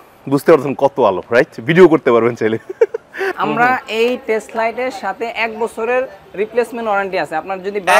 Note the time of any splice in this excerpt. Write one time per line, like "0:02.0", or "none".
0:03.3

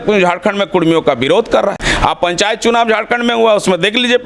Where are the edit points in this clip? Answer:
0:01.8

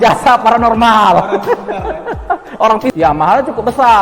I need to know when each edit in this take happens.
0:02.9

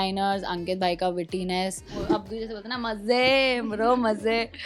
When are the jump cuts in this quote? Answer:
0:02.1

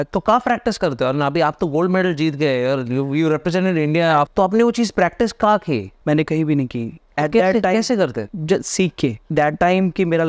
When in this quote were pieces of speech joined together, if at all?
0:04.3
0:05.9
0:08.3
0:09.2

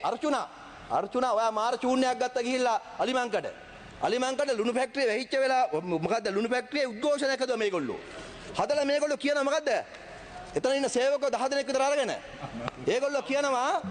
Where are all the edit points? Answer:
none

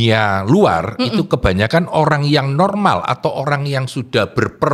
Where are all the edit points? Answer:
none

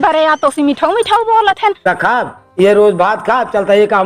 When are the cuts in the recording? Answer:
0:01.8

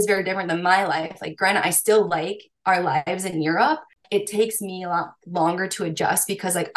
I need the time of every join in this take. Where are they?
0:03.9

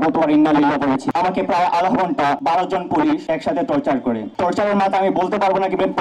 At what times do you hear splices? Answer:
0:01.1
0:02.4
0:03.2
0:04.3

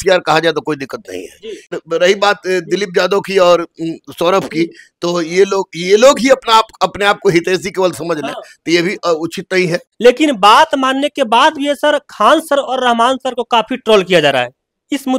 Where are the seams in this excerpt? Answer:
0:01.8
0:09.8

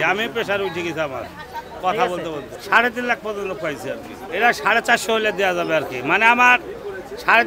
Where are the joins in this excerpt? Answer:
none

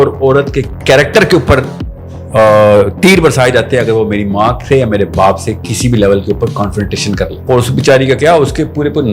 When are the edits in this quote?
0:07.4

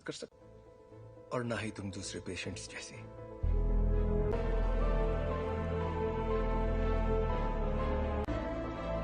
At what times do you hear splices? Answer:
0:04.3

